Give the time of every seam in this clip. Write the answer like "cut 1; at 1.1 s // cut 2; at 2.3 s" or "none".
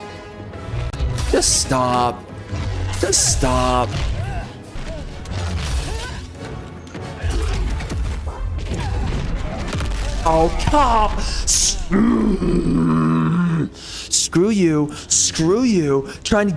cut 1; at 4.8 s